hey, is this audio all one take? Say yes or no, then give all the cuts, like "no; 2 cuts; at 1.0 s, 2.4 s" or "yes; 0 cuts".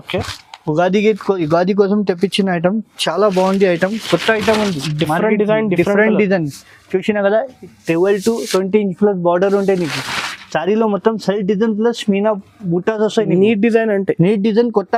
yes; 0 cuts